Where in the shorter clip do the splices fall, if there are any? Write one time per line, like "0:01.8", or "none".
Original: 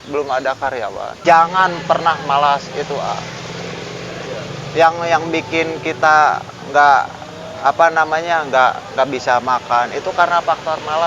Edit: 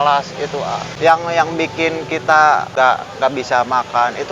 0:00.9
0:02.7

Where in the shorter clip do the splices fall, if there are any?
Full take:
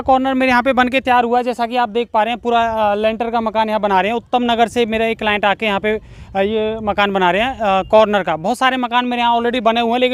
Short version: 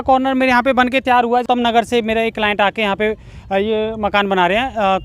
0:01.4

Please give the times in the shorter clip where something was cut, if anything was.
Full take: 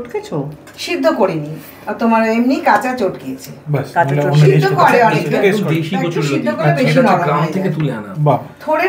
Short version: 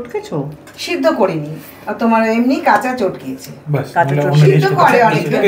none

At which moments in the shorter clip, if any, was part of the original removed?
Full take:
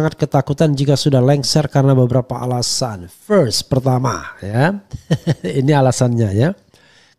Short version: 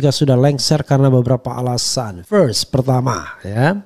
0:02.1

